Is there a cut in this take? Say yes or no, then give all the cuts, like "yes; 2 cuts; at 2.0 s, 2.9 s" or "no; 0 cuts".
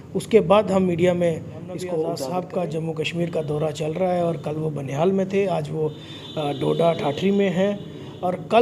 yes; 1 cut; at 2.2 s